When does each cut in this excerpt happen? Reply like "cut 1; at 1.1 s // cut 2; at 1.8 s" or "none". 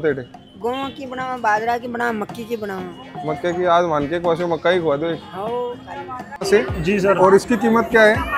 cut 1; at 6.4 s